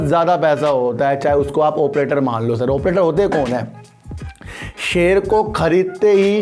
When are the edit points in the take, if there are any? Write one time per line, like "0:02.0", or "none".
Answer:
none